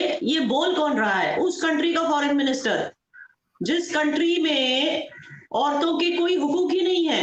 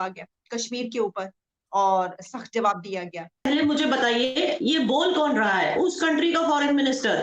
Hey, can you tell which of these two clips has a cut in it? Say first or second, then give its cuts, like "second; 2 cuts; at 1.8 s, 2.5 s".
second; 1 cut; at 3.5 s